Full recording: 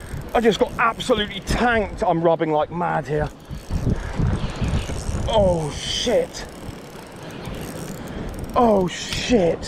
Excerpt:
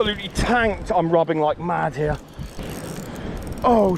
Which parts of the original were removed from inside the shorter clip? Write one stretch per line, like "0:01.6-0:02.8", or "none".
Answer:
0:03.6-0:07.4